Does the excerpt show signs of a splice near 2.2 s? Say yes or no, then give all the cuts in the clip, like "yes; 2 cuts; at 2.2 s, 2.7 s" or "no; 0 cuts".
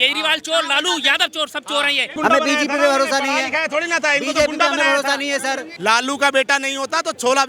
yes; 2 cuts; at 2.2 s, 5.7 s